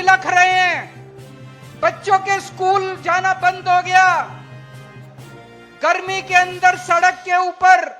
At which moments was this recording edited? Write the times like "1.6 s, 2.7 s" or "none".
4.3 s, 5.7 s

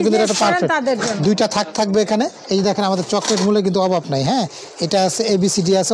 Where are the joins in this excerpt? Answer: 2.4 s

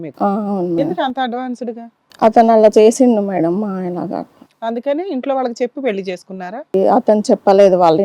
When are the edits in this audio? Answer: 6.7 s

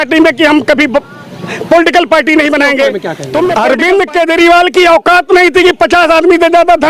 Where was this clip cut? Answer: 3.5 s

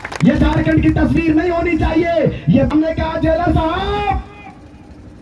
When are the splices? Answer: 2.7 s

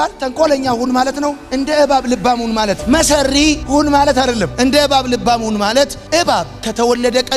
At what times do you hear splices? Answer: none

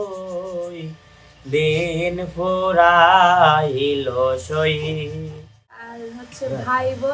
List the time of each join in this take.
5.9 s

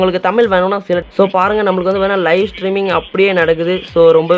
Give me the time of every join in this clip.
1.0 s

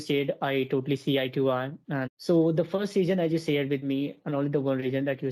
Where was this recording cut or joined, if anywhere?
2.1 s

